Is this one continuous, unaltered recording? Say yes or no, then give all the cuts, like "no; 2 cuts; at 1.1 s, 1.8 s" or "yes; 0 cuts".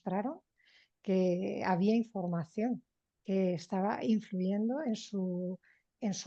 yes; 0 cuts